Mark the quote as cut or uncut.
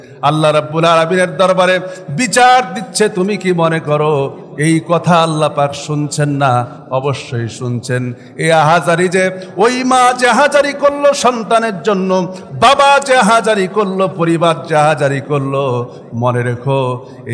uncut